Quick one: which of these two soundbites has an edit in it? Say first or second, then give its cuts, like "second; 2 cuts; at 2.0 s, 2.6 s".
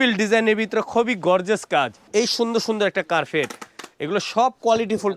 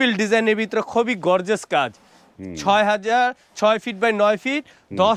first; 1 cut; at 2.0 s